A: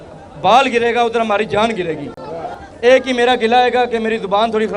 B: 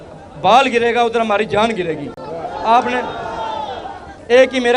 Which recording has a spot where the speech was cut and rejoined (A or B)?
A